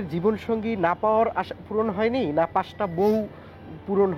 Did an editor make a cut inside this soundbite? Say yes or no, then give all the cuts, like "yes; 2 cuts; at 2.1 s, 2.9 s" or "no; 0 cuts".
no; 0 cuts